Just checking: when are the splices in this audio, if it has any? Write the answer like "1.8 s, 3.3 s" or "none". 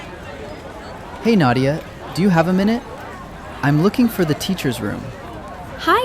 1.2 s

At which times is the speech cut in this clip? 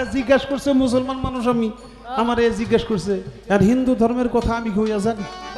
none

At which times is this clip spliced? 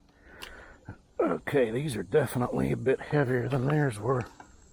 none

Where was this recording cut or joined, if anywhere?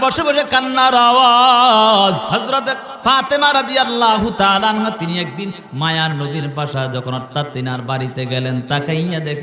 2.2 s

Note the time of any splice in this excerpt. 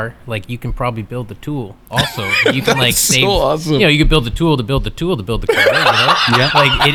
none

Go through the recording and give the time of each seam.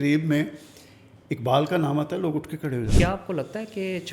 2.9 s

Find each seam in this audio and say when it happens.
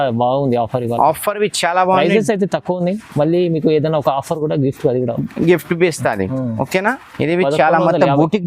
7.1 s

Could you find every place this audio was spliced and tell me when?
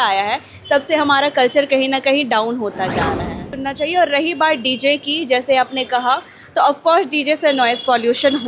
3.5 s

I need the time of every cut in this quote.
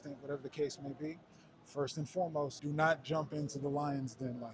2.6 s

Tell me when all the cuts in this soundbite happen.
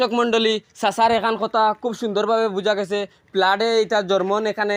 none

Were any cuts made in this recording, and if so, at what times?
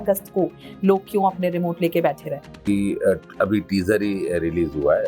2.6 s

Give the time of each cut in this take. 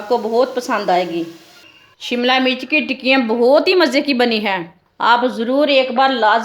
1.7 s

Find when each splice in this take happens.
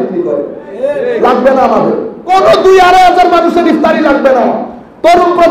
2.1 s

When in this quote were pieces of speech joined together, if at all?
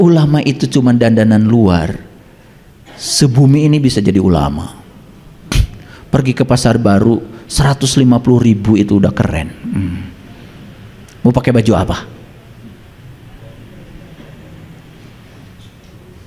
none

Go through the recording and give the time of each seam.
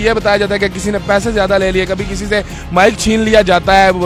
none

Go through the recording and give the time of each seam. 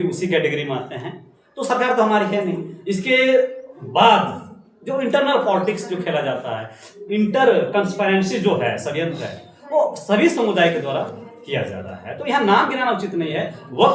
none

